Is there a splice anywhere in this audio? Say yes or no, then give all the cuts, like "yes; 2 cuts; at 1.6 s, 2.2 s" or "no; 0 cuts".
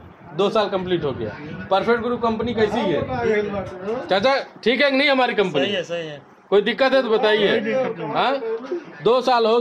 no; 0 cuts